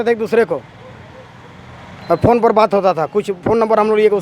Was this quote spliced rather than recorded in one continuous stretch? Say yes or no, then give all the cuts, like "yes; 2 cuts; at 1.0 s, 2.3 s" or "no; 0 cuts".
no; 0 cuts